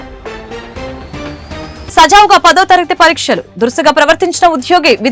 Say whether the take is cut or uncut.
cut